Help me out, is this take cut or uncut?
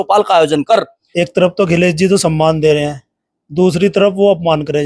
cut